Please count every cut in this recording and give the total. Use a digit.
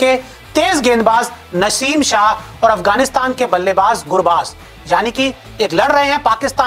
0